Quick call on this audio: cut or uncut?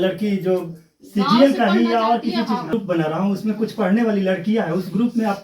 cut